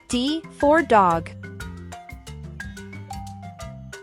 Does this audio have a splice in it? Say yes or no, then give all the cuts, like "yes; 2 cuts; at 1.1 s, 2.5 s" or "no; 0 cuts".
no; 0 cuts